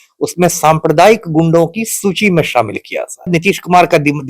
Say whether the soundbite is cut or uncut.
cut